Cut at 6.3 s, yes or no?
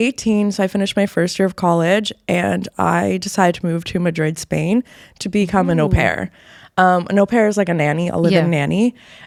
no